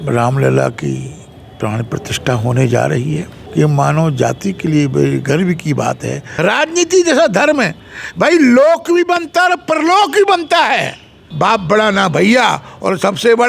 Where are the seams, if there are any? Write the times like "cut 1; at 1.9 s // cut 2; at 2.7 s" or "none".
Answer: cut 1; at 3.4 s // cut 2; at 6.2 s // cut 3; at 11.2 s